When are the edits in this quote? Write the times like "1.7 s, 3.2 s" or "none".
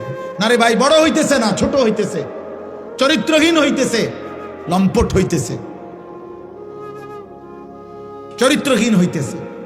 5.8 s, 7.8 s